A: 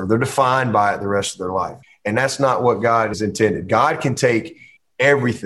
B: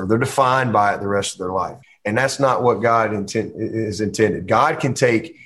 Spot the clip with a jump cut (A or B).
A